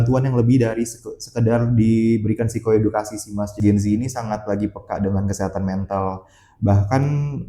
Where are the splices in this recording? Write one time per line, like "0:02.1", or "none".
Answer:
0:03.5